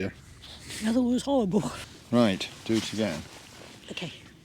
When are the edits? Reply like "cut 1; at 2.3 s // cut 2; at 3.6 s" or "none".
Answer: cut 1; at 1.7 s

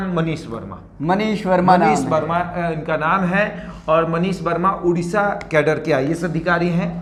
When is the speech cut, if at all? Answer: none

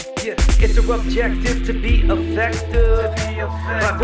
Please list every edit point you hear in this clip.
none

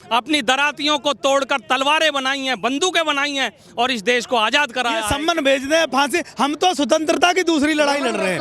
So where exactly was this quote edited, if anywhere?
cut 1; at 5.1 s

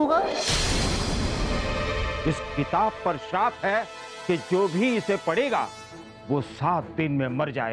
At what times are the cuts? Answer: cut 1; at 2.1 s

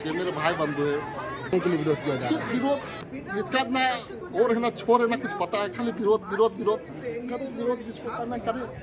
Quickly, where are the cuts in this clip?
cut 1; at 1.5 s

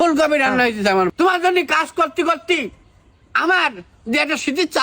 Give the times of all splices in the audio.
cut 1; at 1.1 s

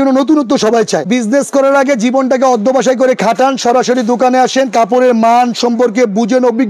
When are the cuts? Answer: cut 1; at 1.1 s

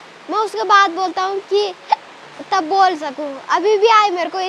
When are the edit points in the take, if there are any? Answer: none

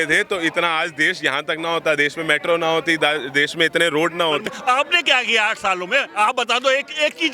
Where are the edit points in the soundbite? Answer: cut 1; at 4.4 s

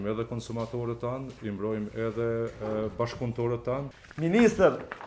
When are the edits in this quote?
cut 1; at 3.9 s

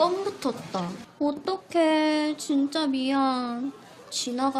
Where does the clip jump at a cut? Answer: cut 1; at 1.0 s

